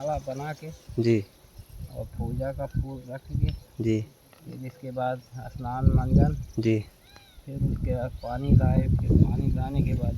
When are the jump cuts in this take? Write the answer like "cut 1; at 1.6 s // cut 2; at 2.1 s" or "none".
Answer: none